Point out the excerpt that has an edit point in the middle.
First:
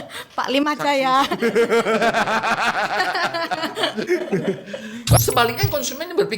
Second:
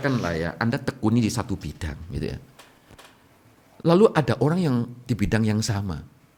first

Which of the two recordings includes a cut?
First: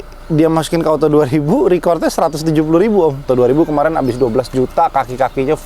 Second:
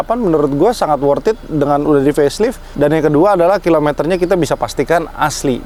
first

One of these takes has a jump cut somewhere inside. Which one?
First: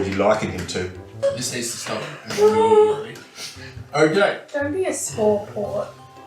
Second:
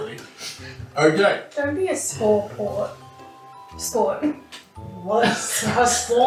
first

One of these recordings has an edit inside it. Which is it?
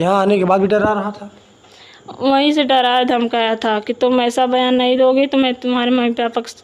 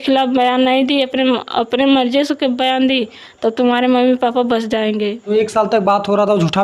second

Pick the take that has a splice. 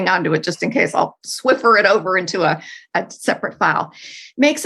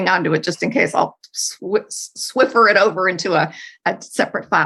first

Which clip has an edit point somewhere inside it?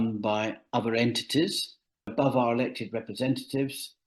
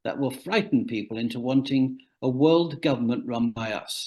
first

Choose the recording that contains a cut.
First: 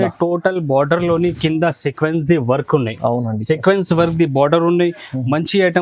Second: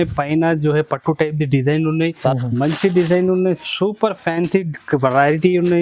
second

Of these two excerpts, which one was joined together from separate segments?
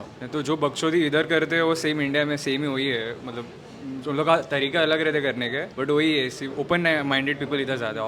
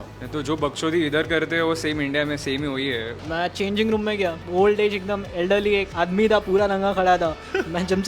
second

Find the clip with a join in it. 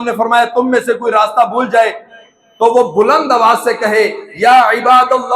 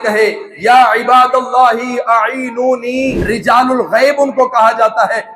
second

